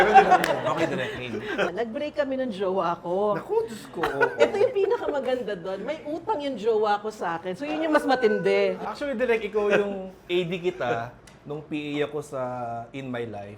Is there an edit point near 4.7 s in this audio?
no; 2 cuts; at 1.7 s, 8.9 s

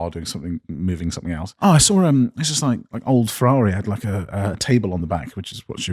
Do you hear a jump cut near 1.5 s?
yes; 1 cut; at 1.5 s

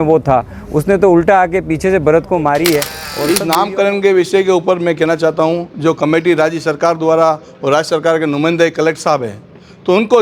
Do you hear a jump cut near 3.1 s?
yes; 1 cut; at 3.1 s

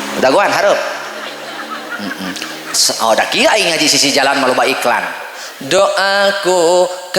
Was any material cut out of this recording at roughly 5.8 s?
yes; 1 cut; at 5.8 s

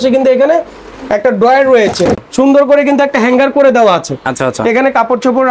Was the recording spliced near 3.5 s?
no; 1 cut; at 2.2 s

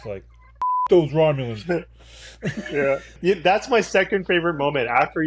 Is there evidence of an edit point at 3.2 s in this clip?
yes; 1 cut; at 3.2 s

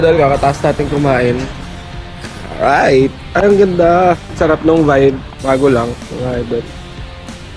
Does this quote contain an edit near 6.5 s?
no; 0 cuts

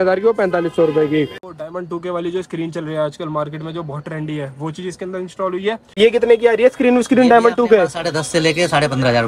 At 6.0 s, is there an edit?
yes; 2 cuts; at 1.5 s, 6.0 s

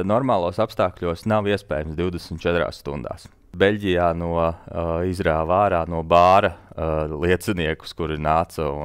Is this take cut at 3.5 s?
yes; 1 cut; at 3.5 s

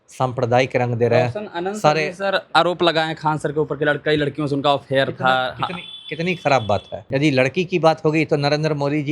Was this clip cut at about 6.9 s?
yes; 1 cut; at 6.9 s

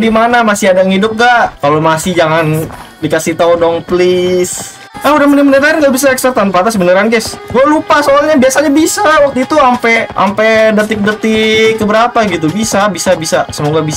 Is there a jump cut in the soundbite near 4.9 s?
yes; 2 cuts; at 4.9 s, 10.1 s

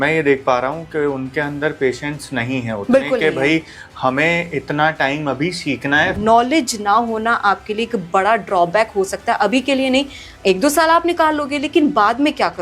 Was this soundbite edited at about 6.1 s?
yes; 1 cut; at 6.1 s

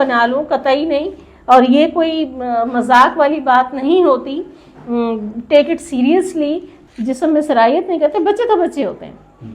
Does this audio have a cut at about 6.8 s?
yes; 1 cut; at 6.8 s

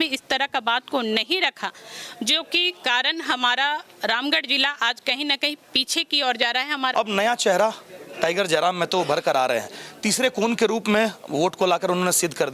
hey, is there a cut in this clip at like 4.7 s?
no; 1 cut; at 6.9 s

